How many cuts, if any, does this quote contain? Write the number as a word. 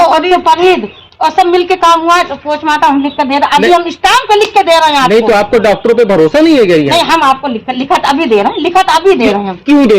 one